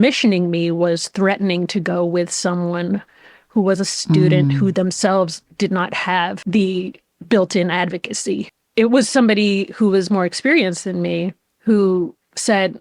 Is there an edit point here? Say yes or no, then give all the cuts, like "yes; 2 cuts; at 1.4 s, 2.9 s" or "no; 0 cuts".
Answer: yes; 2 cuts; at 6.4 s, 11.5 s